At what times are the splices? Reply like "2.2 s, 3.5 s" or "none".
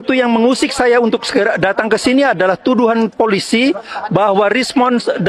none